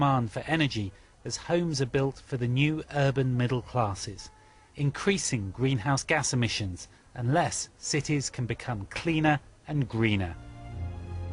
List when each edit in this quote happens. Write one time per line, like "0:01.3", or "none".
0:01.6